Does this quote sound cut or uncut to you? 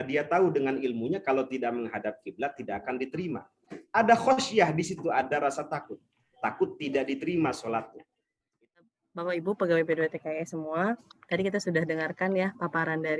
cut